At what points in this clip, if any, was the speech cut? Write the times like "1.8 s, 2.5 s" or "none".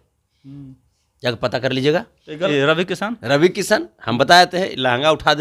2.5 s